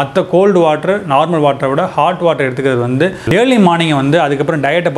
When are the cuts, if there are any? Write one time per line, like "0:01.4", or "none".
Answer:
0:03.2